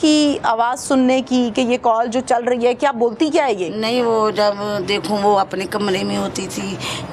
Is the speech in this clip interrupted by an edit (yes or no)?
no